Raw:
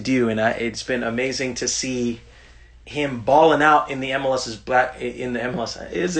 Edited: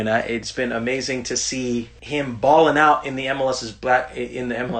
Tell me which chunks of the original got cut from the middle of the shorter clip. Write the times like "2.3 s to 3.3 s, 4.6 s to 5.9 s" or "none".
2.3 s to 2.8 s